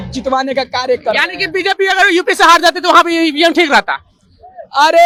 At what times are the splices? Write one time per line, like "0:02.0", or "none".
none